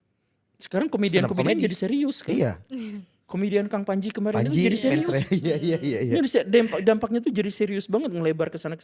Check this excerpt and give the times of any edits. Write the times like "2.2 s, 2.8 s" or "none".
none